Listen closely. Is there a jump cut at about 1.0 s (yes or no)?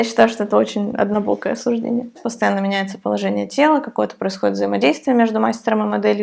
no